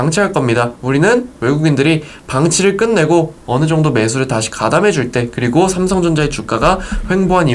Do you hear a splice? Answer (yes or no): no